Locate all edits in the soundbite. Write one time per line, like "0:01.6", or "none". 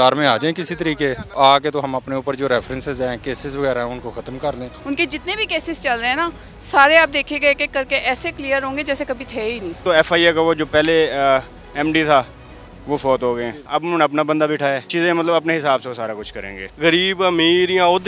0:01.3
0:04.7
0:09.8
0:13.6
0:14.9
0:16.6